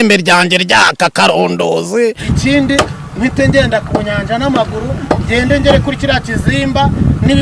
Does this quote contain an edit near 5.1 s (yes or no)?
no